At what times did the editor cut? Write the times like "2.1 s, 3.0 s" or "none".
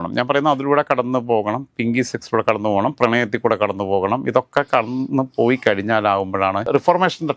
none

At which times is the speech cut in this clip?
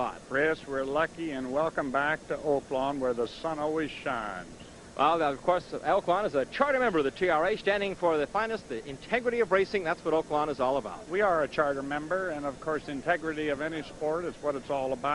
3.3 s

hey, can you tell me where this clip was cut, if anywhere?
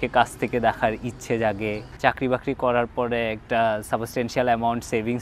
2.0 s

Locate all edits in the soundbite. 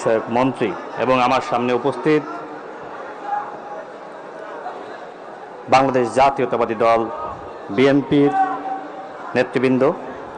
none

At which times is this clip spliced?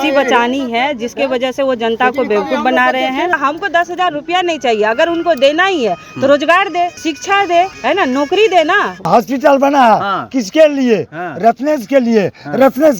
3.4 s, 7.0 s, 7.8 s, 9.1 s

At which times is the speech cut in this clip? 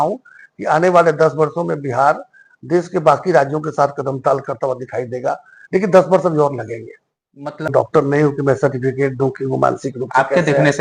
7.7 s

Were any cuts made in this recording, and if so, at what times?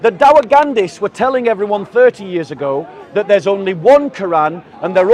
none

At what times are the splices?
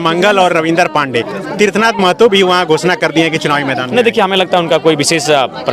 none

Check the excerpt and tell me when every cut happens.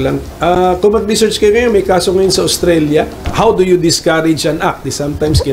3.3 s

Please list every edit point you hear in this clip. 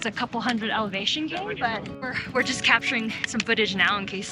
2.2 s

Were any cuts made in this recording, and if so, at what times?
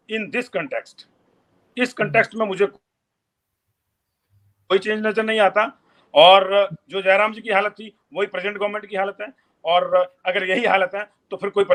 none

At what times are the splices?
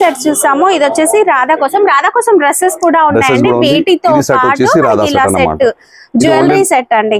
none

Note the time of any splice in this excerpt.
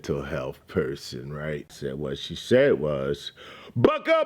1.7 s

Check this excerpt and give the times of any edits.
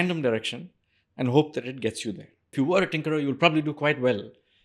2.5 s

